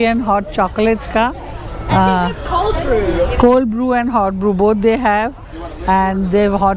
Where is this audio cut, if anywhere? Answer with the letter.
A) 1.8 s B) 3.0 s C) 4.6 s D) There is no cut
D